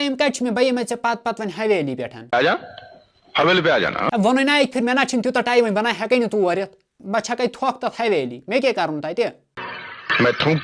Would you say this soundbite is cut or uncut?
uncut